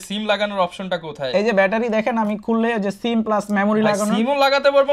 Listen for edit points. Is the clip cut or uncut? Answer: uncut